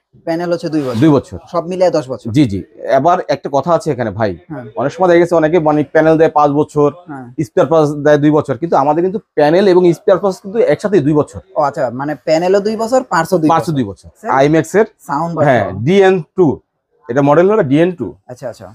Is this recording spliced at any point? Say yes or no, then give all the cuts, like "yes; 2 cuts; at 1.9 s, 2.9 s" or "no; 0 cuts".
yes; 1 cut; at 14.2 s